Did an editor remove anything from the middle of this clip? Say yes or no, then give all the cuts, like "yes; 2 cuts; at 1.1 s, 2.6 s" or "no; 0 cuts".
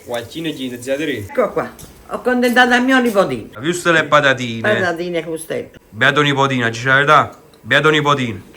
yes; 2 cuts; at 3.5 s, 5.8 s